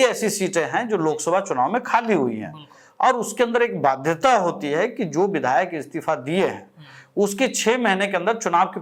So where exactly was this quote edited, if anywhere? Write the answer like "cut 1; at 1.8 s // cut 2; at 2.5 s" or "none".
none